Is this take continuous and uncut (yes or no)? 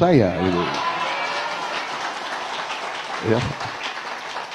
yes